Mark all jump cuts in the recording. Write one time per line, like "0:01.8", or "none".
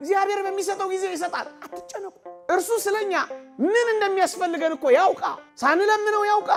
none